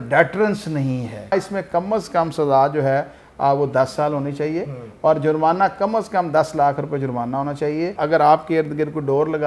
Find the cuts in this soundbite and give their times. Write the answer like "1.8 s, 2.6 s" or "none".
1.3 s, 7.9 s